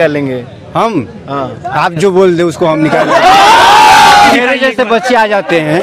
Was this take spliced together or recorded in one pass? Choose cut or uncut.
cut